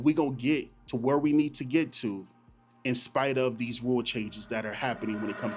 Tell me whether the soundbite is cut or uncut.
uncut